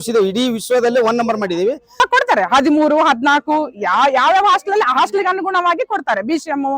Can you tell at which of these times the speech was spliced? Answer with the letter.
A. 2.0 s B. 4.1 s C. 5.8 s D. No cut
A